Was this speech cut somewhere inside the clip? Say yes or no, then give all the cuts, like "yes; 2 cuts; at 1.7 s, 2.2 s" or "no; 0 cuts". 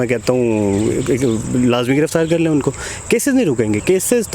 no; 0 cuts